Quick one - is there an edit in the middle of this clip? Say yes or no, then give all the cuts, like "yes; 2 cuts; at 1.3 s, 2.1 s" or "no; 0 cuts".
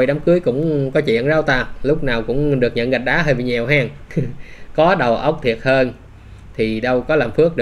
yes; 1 cut; at 4.0 s